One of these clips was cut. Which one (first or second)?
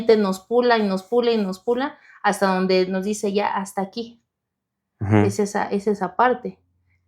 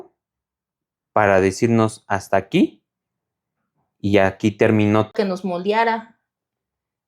second